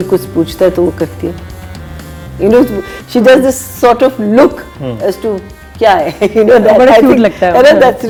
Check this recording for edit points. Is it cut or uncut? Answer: uncut